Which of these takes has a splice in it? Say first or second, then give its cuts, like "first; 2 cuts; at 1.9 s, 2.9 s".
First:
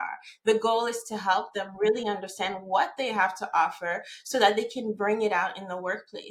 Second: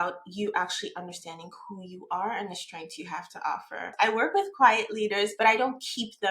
second; 2 cuts; at 3.9 s, 5.3 s